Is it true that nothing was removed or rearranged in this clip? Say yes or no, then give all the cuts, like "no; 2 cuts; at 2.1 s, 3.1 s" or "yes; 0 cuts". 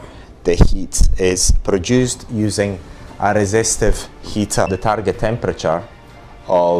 no; 1 cut; at 4.7 s